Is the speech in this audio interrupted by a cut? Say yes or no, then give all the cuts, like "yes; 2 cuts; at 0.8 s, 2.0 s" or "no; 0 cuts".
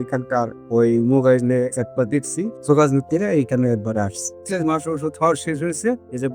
yes; 2 cuts; at 2.6 s, 4.4 s